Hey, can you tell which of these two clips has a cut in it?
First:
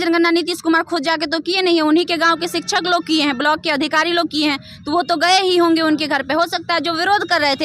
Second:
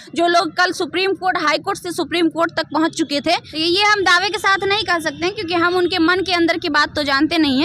second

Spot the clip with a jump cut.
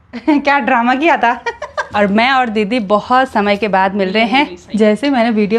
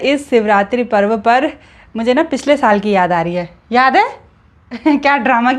first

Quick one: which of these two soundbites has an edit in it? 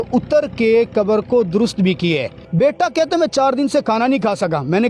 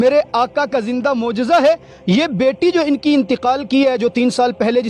first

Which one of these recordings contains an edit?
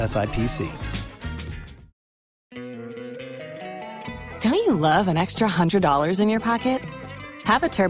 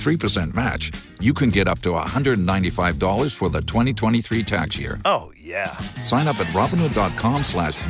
first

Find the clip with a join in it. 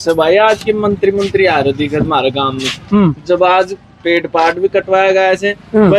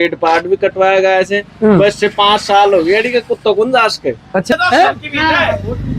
second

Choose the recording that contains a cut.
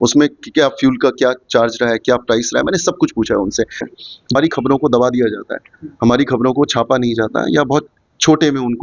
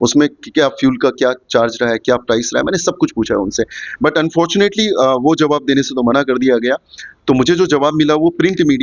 first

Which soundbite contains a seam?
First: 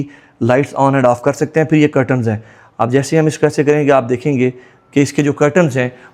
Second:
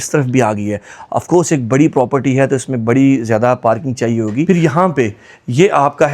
second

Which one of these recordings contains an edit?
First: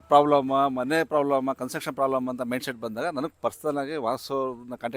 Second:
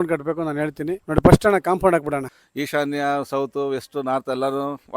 second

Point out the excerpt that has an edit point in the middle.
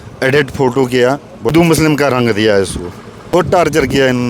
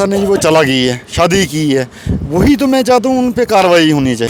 first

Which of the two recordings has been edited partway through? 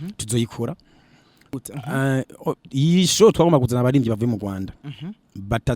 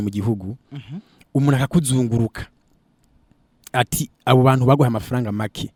first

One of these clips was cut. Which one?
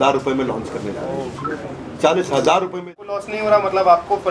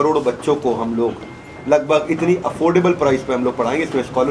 first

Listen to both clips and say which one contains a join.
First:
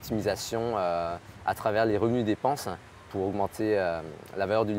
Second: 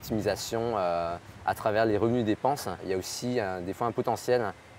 second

